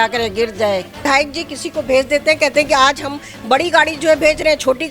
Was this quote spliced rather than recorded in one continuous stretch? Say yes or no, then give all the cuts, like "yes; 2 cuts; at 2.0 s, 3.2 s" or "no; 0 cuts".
yes; 1 cut; at 1.0 s